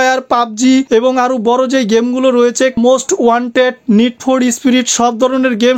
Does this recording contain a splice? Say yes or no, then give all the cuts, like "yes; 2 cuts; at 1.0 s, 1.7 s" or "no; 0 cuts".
no; 0 cuts